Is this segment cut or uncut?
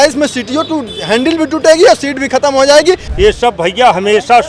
cut